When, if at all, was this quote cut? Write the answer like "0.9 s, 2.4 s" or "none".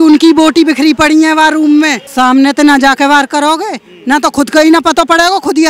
2.0 s